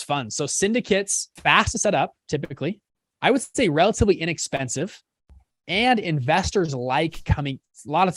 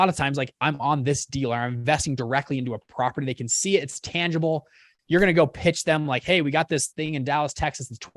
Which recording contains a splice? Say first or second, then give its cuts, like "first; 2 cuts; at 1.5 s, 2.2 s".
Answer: first; 1 cut; at 1.3 s